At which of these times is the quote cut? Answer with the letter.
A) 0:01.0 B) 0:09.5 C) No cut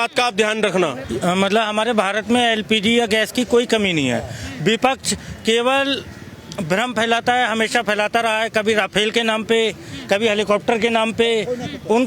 A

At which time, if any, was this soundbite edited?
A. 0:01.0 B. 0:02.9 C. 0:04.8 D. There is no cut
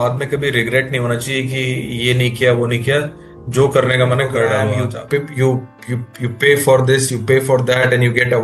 C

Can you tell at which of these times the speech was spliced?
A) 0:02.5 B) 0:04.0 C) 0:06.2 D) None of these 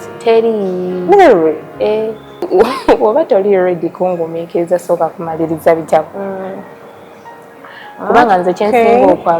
A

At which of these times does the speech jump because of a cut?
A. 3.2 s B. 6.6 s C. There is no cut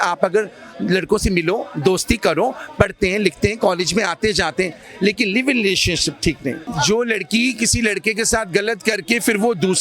B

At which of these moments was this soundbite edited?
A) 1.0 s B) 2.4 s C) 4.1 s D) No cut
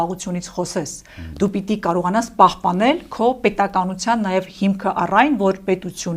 D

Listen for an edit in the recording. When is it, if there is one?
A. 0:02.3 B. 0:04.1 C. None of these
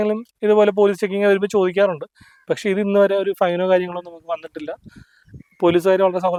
C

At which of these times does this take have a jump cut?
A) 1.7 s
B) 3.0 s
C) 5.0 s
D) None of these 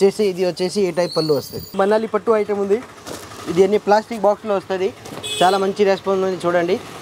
A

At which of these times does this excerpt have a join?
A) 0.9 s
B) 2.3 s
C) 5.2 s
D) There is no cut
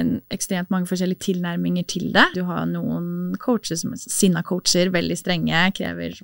B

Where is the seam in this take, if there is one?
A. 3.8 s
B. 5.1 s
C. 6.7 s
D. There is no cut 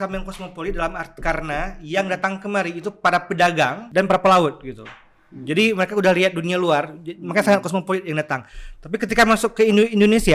A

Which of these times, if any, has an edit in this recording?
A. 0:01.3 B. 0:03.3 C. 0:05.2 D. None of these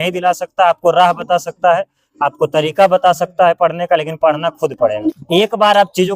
C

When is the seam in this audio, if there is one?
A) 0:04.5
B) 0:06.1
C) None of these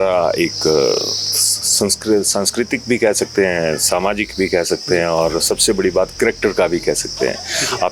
C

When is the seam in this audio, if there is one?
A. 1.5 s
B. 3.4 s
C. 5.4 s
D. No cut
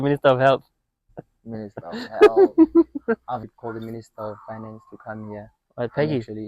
B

